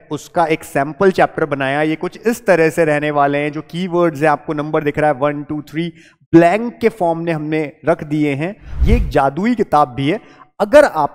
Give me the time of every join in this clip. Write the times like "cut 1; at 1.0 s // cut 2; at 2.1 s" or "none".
cut 1; at 8.7 s